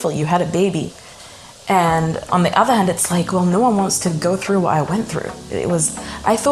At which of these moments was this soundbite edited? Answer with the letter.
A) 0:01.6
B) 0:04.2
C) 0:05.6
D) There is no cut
D